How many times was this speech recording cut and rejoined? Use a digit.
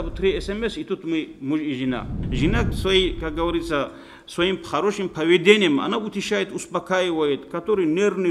1